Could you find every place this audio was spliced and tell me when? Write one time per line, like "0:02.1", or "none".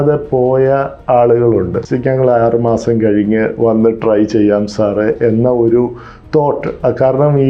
0:01.8